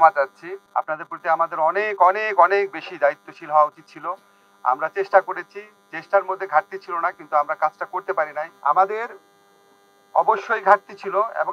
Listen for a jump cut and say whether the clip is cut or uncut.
uncut